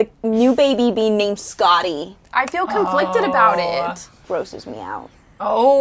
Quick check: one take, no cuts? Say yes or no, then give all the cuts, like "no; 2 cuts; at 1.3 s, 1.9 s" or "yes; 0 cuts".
no; 1 cut; at 4.1 s